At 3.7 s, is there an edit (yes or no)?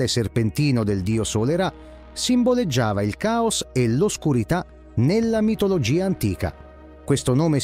no